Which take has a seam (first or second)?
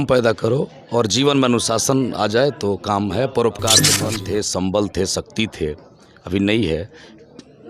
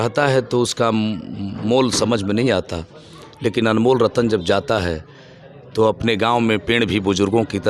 first